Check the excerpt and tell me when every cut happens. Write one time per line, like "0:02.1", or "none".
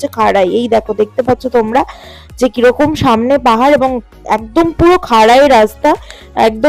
none